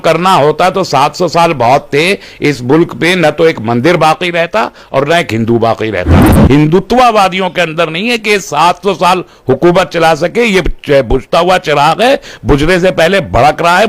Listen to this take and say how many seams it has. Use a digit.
1